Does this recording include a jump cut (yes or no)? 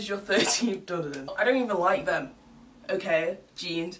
yes